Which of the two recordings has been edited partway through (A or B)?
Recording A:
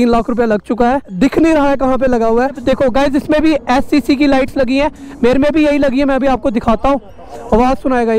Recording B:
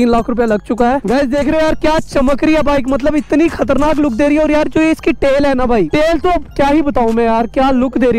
B